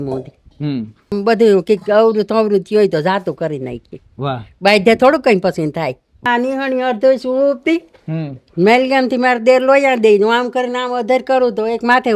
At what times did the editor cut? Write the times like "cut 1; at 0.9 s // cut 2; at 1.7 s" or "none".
cut 1; at 1.2 s // cut 2; at 6.3 s